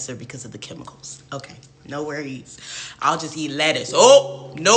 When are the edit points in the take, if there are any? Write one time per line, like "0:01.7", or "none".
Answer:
0:02.6